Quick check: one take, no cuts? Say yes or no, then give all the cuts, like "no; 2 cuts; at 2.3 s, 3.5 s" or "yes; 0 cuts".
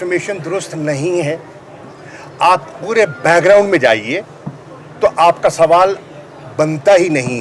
yes; 0 cuts